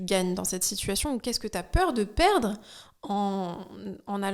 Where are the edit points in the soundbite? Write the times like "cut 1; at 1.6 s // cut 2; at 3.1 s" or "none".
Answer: none